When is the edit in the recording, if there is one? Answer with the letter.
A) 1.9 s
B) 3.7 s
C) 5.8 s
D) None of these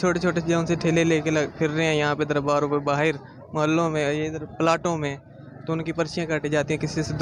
D